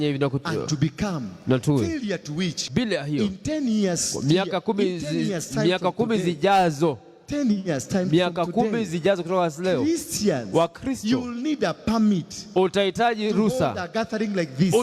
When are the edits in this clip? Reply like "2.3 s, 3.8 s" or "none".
2.6 s